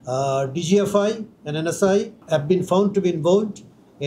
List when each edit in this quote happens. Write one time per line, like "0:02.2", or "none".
0:02.2